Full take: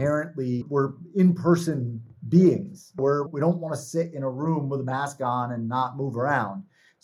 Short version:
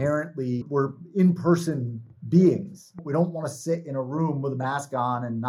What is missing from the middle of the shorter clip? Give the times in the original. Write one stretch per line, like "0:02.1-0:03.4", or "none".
0:03.0-0:03.2